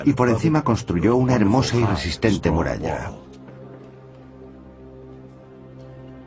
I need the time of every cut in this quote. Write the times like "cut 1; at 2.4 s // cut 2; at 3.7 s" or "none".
cut 1; at 4.8 s